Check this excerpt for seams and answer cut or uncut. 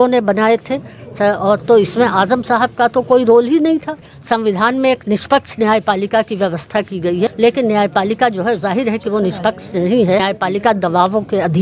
cut